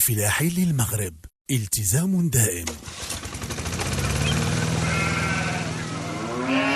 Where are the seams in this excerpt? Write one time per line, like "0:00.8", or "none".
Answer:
0:02.6